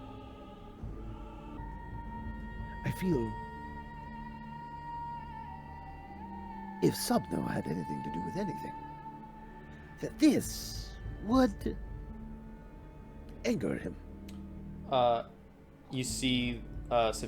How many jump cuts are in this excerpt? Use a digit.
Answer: 1